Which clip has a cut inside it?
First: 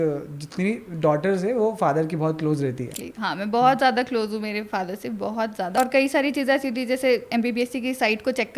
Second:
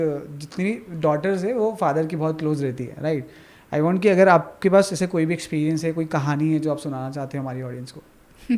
first; 2 cuts; at 2.9 s, 5.8 s

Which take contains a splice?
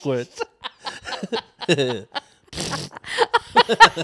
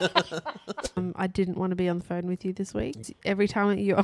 second; 2 cuts; at 1.0 s, 3.1 s

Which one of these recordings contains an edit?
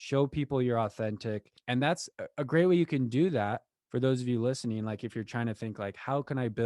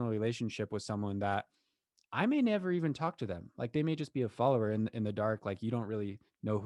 first; 1 cut; at 1.5 s

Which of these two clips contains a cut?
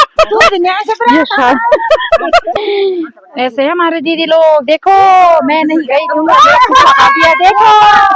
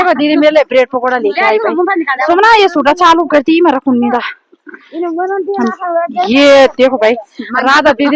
first; 1 cut; at 2.5 s

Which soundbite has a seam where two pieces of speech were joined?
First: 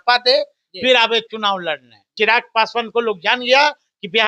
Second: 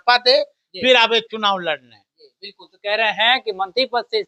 first; 1 cut; at 2.0 s

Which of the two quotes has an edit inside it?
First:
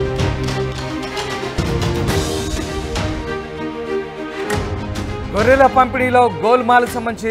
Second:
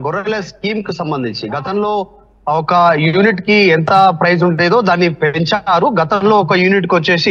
first; 1 cut; at 1.6 s

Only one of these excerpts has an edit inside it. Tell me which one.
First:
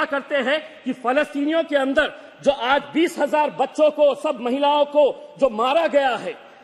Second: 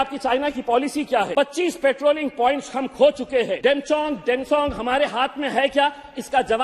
second; 2 cuts; at 1.3 s, 3.5 s

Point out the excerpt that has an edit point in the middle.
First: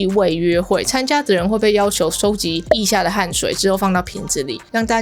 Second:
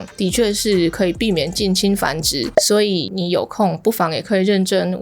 second; 1 cut; at 2.5 s

